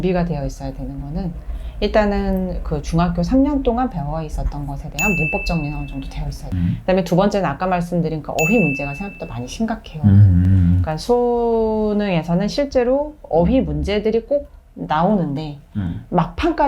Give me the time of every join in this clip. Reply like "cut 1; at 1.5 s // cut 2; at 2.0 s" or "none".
cut 1; at 6.4 s